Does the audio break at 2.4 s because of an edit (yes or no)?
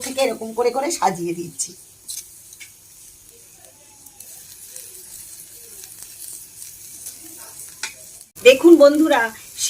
no